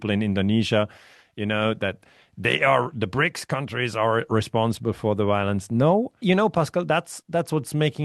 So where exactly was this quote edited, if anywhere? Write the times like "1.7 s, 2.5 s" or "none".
6.2 s